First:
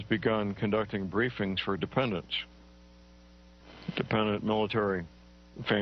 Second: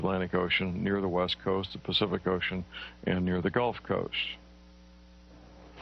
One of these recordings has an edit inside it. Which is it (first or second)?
second